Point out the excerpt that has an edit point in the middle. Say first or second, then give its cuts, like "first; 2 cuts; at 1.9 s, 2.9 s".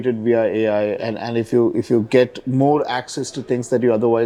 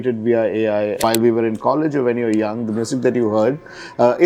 second; 1 cut; at 1.0 s